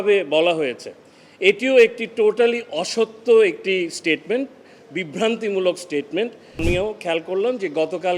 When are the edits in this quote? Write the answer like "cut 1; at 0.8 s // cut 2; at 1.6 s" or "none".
cut 1; at 6.6 s